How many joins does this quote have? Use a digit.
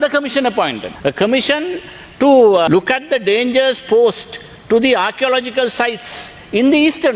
2